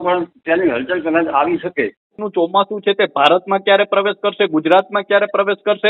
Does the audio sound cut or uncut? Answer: cut